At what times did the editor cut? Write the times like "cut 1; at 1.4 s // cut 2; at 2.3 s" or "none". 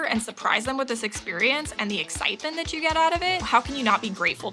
cut 1; at 3.4 s